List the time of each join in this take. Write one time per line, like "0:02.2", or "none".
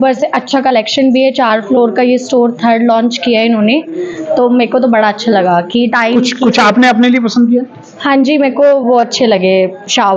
none